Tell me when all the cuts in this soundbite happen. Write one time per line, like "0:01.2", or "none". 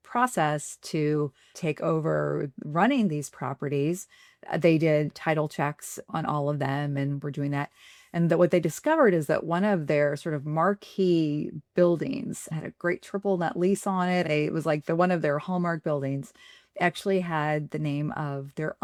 none